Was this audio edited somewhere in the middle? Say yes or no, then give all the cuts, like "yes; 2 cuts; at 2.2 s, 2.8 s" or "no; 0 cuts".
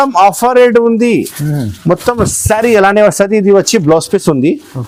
no; 0 cuts